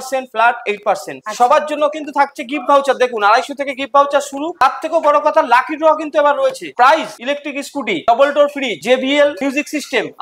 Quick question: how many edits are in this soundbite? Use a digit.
3